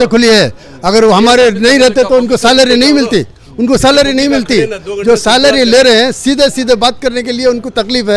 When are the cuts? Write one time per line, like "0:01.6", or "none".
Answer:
none